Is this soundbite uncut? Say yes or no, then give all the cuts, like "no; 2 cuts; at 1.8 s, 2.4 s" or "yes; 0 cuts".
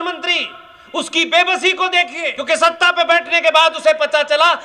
no; 1 cut; at 2.3 s